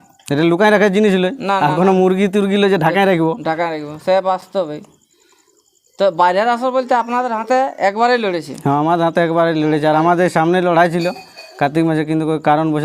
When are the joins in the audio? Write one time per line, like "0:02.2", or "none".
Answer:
none